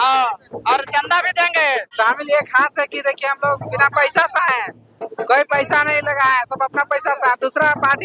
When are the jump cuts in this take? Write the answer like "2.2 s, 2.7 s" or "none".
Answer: 1.9 s